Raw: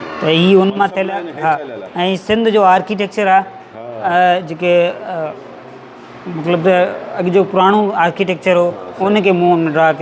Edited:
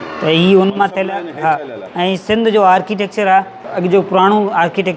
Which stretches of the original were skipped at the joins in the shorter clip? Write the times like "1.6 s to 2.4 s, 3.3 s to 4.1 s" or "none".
3.6 s to 7.1 s